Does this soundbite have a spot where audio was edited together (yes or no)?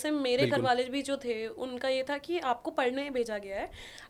no